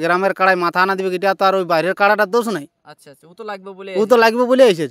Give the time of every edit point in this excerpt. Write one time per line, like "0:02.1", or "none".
none